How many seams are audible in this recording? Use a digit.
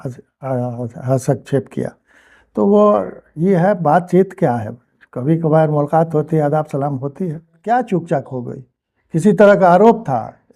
1